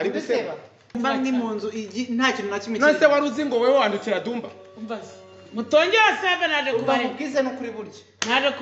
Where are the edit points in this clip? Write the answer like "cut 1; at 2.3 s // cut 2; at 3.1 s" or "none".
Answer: cut 1; at 1.0 s

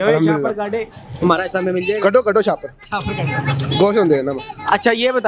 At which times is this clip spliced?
none

